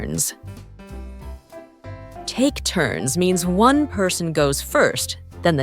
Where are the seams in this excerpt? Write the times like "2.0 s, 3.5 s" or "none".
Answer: 0.7 s, 2.3 s